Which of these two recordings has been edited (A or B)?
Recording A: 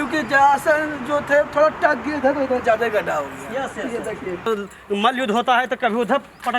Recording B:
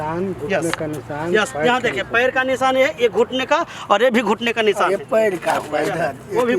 A